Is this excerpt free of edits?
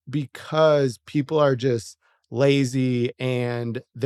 yes; 0 cuts

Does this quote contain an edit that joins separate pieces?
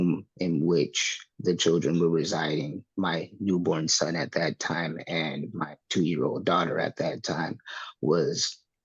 no; 0 cuts

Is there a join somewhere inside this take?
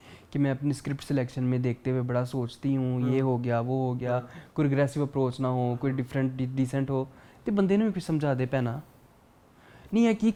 no; 0 cuts

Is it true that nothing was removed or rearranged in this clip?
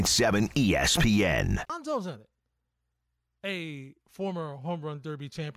no; 1 cut; at 1.7 s

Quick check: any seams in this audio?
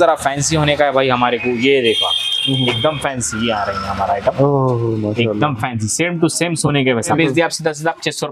yes; 1 cut; at 7.1 s

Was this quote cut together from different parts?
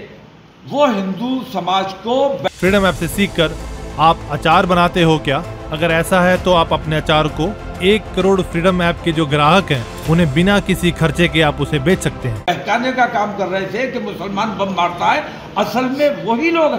yes; 2 cuts; at 2.5 s, 12.5 s

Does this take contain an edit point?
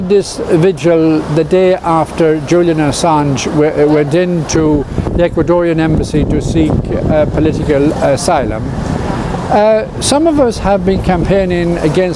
yes; 1 cut; at 10.3 s

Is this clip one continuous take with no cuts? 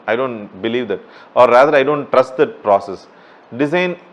yes; 0 cuts

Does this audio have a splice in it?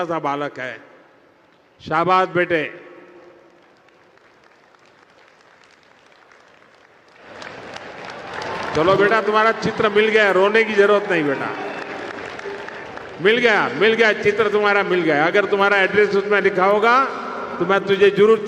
no; 0 cuts

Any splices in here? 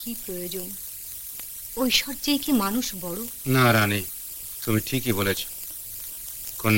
yes; 1 cut; at 3.3 s

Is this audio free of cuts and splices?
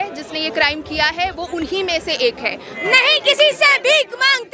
no; 1 cut; at 2.7 s

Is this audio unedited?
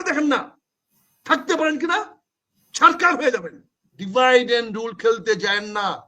no; 1 cut; at 4.0 s

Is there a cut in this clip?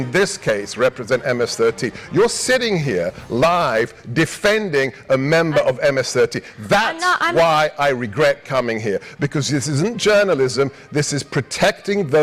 no; 0 cuts

